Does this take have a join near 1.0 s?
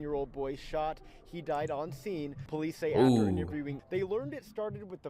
no; 2 cuts; at 2.4 s, 3.8 s

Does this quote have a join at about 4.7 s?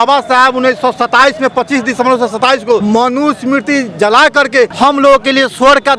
yes; 2 cuts; at 2.8 s, 4.7 s

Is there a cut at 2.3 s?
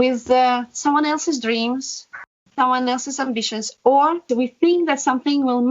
yes; 2 cuts; at 2.3 s, 4.2 s

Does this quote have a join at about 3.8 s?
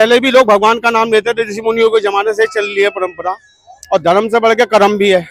no; 0 cuts

